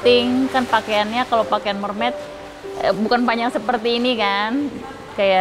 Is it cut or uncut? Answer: uncut